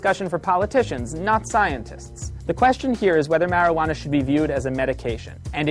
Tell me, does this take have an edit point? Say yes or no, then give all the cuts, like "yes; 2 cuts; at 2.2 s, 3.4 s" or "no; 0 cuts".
yes; 1 cut; at 3.5 s